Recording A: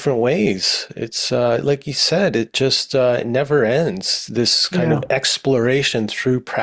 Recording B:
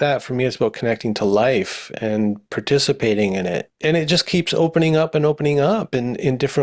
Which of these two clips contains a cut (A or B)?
B